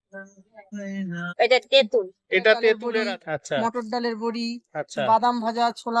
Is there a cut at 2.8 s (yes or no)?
yes